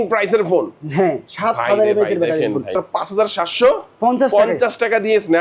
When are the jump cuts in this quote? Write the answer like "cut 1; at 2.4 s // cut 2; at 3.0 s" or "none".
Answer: cut 1; at 2.8 s

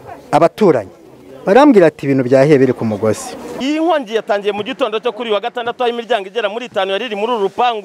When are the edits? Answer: cut 1; at 3.5 s

